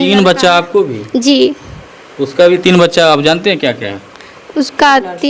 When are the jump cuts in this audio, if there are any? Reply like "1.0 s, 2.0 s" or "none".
none